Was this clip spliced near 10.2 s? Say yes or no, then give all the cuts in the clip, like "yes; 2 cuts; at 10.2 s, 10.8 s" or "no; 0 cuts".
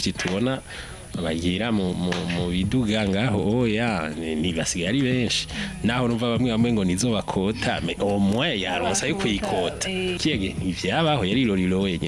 yes; 1 cut; at 10.2 s